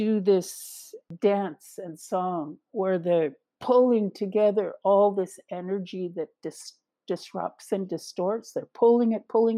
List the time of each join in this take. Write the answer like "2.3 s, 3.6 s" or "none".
1.1 s